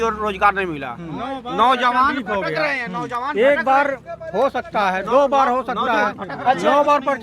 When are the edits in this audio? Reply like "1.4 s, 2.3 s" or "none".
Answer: none